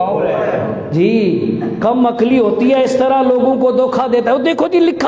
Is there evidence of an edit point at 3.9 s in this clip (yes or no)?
no